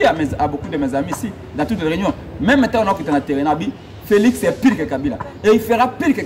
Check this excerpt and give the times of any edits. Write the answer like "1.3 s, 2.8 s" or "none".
none